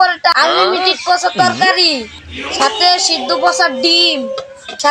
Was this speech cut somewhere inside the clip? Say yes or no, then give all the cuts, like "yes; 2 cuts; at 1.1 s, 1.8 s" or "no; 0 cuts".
no; 0 cuts